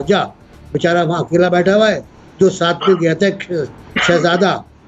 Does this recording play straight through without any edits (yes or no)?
yes